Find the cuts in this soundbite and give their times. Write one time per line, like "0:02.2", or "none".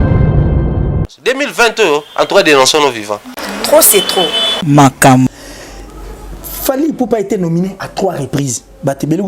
0:05.5